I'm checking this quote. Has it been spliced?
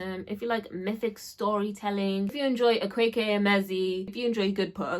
yes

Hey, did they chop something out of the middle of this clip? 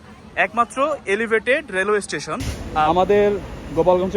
yes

